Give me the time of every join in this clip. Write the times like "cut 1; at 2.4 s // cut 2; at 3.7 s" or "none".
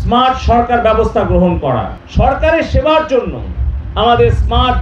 cut 1; at 1.9 s